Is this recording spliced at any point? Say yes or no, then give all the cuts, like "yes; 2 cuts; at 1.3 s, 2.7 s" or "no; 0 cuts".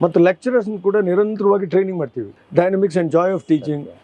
yes; 1 cut; at 2.3 s